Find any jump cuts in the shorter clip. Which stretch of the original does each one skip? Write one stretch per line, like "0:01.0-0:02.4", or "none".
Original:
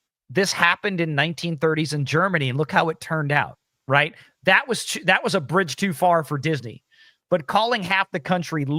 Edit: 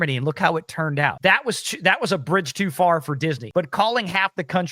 0:03.5-0:04.4
0:06.7-0:07.2